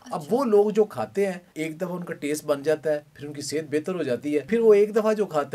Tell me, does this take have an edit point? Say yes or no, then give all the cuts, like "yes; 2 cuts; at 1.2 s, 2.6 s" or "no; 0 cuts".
yes; 2 cuts; at 1.5 s, 4.5 s